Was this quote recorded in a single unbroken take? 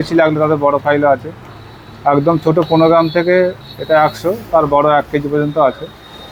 yes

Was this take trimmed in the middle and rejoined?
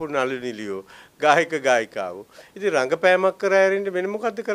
no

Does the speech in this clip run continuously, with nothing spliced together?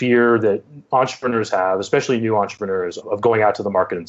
no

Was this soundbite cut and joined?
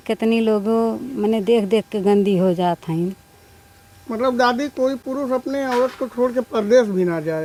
no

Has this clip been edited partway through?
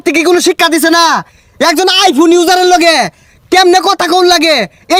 no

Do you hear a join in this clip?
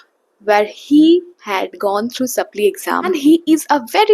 yes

